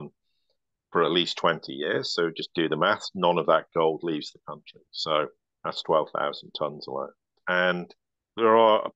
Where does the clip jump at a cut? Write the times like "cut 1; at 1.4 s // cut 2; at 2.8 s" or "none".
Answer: cut 1; at 7.4 s

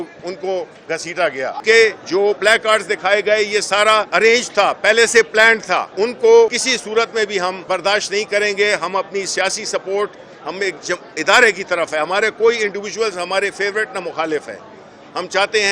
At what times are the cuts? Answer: cut 1; at 1.6 s // cut 2; at 4.1 s // cut 3; at 5.9 s // cut 4; at 6.6 s // cut 5; at 7.6 s

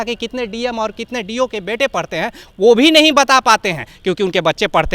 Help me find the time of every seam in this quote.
none

